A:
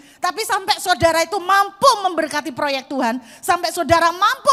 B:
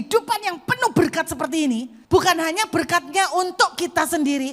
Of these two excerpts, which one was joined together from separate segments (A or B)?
B